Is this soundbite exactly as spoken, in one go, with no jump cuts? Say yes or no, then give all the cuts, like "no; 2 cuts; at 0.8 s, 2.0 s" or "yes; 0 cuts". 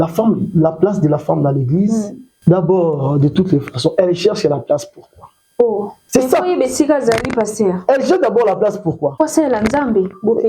no; 3 cuts; at 2.2 s, 6.0 s, 9.1 s